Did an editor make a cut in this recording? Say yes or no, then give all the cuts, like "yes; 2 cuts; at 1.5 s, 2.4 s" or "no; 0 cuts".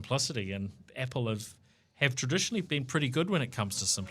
no; 0 cuts